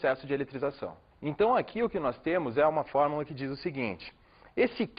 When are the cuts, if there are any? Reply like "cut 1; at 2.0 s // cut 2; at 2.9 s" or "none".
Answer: cut 1; at 2.7 s